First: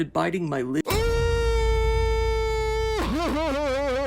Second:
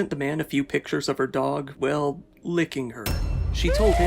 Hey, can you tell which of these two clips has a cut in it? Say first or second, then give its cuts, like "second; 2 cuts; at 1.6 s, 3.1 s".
second; 1 cut; at 1.7 s